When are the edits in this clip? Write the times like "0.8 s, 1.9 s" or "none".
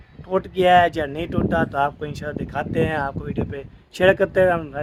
none

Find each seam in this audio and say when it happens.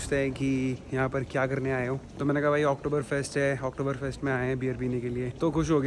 none

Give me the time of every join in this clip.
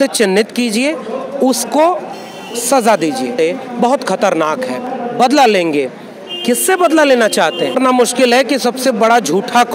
3.3 s, 4.8 s, 7.8 s

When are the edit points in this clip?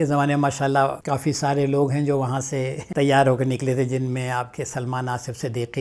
1.0 s, 2.8 s

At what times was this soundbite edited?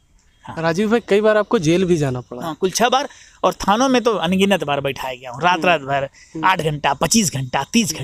none

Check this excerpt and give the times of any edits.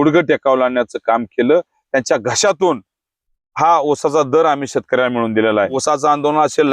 5.8 s

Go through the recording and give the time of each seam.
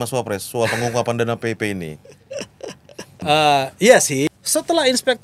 3.2 s, 4.3 s

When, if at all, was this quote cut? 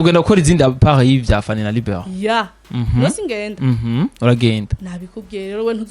none

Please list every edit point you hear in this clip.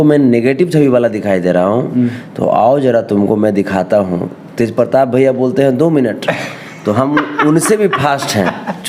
none

